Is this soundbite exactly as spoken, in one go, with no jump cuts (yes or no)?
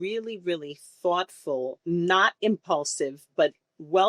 no